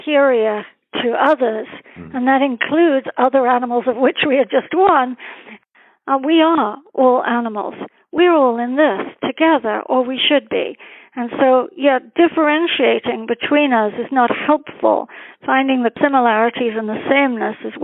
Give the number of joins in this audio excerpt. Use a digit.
2